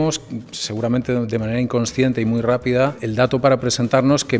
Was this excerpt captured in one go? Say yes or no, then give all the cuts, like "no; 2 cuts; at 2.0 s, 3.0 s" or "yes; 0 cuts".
yes; 0 cuts